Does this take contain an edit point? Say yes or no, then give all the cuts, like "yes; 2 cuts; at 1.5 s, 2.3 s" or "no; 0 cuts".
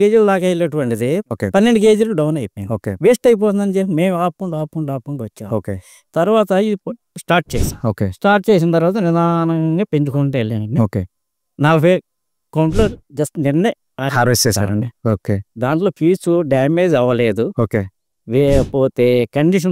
no; 0 cuts